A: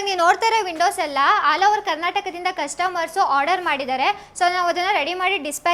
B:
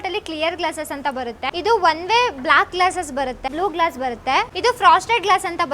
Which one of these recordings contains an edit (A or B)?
B